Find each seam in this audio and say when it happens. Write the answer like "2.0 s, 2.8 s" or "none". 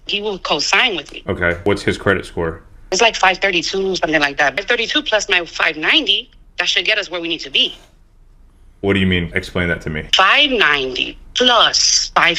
none